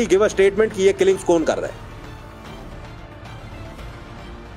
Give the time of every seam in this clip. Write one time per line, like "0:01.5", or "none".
none